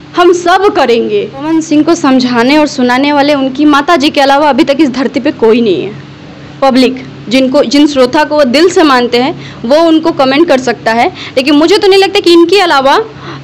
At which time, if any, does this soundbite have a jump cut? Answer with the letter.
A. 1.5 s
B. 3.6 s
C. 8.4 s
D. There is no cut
A